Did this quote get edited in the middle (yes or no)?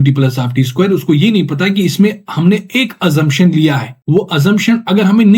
yes